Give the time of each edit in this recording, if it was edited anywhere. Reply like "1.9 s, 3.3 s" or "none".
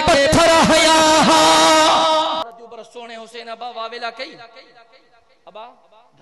2.4 s